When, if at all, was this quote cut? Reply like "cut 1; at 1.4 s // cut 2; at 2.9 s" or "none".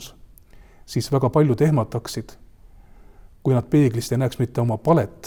none